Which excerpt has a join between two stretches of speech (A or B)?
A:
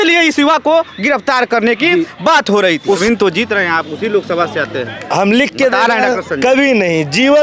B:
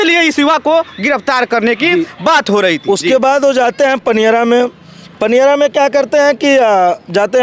A